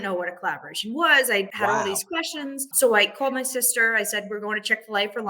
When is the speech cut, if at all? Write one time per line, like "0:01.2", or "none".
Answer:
0:01.5
0:02.7